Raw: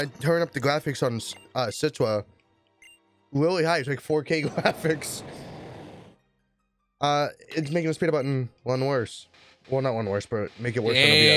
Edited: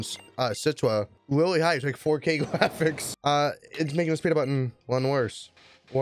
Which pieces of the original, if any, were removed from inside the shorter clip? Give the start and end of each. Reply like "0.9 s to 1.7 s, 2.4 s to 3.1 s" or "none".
2.3 s to 3.2 s, 5.1 s to 6.9 s